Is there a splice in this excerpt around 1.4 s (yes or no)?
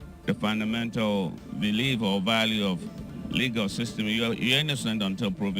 yes